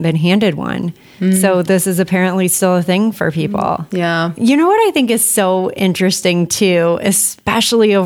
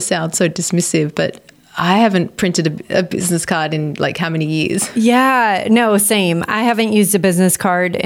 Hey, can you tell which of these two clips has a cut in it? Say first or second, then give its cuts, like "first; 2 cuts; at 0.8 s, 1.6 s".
second; 1 cut; at 4.9 s